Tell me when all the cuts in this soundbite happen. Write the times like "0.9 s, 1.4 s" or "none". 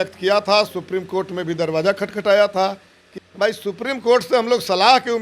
3.1 s

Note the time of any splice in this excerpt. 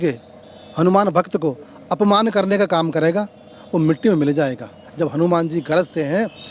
4.8 s

